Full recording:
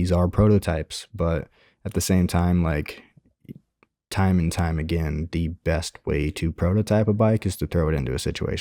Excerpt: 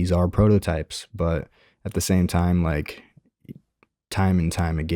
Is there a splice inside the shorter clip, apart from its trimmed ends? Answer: no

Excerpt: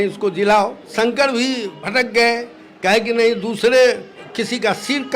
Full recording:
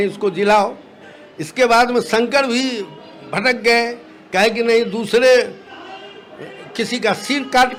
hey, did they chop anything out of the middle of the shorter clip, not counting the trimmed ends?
yes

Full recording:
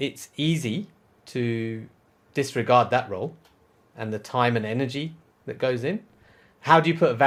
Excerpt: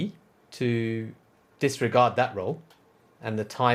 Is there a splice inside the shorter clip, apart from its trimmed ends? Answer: no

